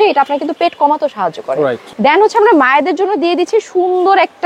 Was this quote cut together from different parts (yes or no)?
yes